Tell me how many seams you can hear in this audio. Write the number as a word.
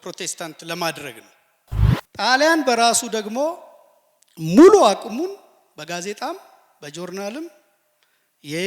one